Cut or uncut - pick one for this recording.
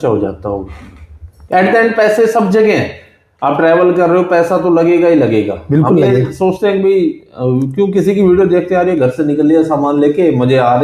uncut